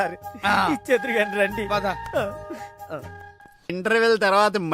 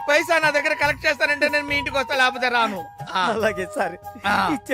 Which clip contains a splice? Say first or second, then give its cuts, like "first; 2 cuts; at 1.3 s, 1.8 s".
first; 1 cut; at 3.7 s